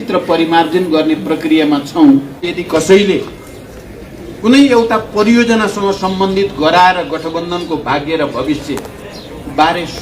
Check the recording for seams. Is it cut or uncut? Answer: cut